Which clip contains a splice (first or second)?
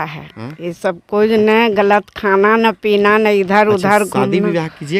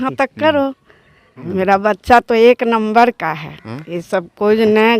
second